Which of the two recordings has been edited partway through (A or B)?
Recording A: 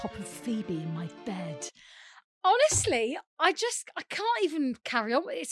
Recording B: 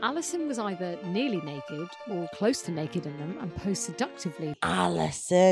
B